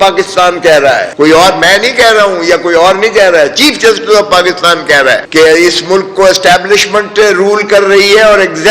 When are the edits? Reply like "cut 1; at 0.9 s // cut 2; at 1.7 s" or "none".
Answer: cut 1; at 1.1 s // cut 2; at 5.2 s